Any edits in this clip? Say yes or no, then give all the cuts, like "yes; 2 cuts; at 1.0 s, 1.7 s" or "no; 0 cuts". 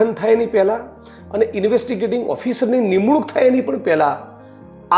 no; 0 cuts